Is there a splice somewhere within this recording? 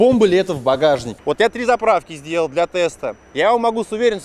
yes; 1 cut; at 1.1 s

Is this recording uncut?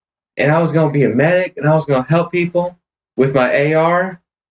no; 1 cut; at 1.0 s

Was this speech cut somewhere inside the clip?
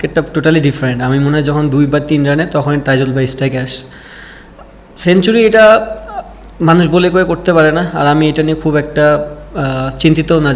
no; 0 cuts

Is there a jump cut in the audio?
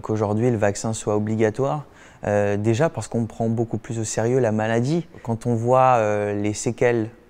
no; 0 cuts

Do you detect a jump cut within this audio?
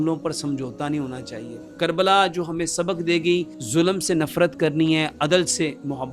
yes; 2 cuts; at 1.6 s, 3.6 s

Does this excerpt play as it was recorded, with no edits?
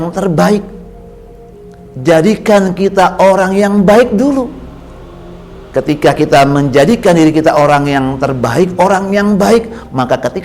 yes; 0 cuts

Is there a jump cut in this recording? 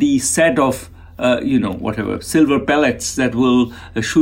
no; 0 cuts

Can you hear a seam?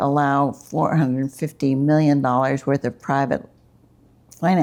no; 0 cuts

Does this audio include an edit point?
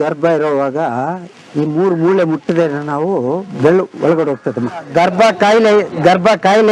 yes; 1 cut; at 4.9 s

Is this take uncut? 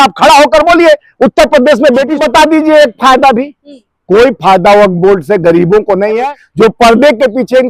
no; 2 cuts; at 2.1 s, 6.2 s

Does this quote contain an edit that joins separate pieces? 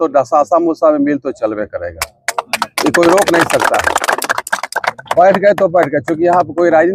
no; 0 cuts

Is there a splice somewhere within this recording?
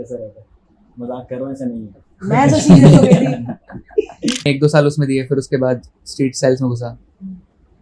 yes; 1 cut; at 4.5 s

